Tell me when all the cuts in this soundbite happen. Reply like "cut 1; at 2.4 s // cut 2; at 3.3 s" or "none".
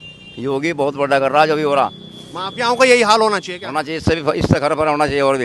none